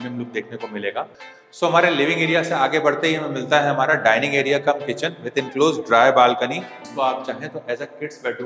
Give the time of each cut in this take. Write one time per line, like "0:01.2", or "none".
0:01.2
0:06.8